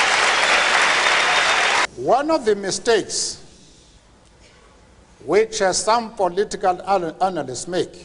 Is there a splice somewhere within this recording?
yes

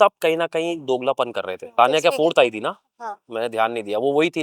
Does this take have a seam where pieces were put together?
yes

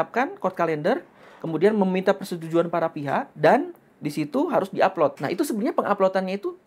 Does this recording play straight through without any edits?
no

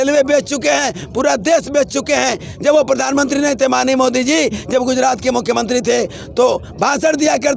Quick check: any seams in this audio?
no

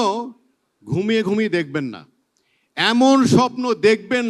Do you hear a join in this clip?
no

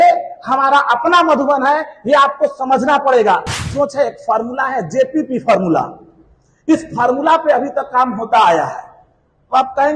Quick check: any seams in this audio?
yes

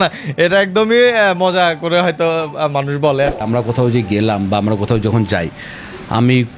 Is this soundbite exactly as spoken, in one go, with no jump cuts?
no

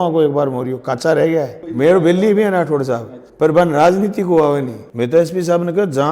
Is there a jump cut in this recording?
yes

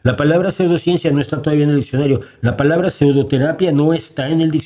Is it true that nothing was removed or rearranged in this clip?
yes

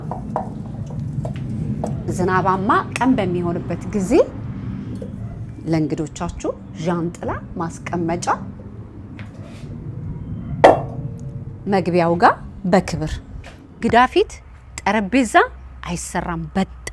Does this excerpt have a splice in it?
yes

